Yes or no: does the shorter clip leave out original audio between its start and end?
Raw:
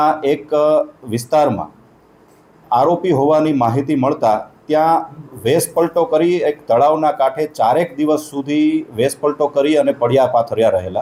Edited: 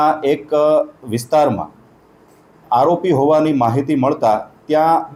no